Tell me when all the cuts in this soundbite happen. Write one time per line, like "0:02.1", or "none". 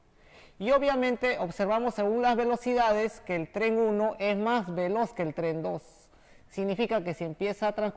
0:03.2